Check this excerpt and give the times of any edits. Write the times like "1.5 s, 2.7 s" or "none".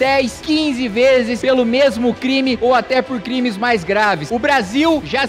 4.2 s